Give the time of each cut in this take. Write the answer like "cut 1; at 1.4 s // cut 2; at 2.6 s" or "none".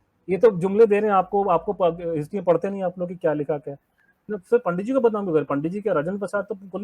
cut 1; at 4.3 s